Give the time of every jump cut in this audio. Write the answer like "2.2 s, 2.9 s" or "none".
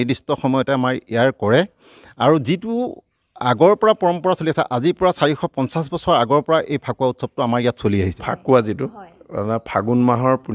8.2 s